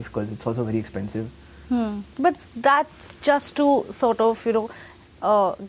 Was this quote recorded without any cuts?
yes; 0 cuts

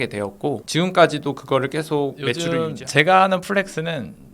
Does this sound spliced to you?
yes; 1 cut; at 2.4 s

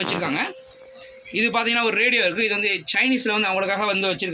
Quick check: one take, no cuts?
yes; 0 cuts

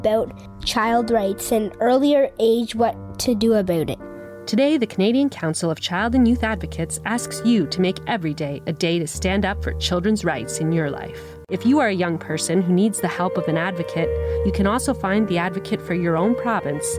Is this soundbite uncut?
no; 1 cut; at 11.5 s

